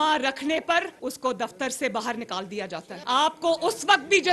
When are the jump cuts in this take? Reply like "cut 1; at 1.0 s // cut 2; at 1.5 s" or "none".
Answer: cut 1; at 0.9 s // cut 2; at 2.9 s